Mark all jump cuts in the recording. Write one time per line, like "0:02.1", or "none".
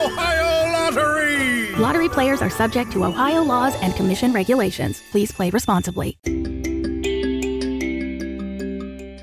0:06.2